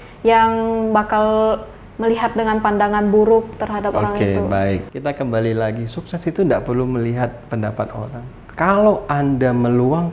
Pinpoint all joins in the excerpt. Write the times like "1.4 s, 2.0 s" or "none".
4.9 s, 8.4 s